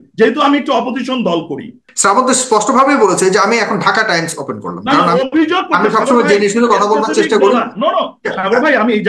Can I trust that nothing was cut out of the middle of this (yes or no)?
no